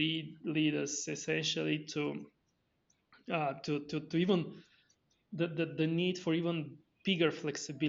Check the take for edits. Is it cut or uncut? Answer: uncut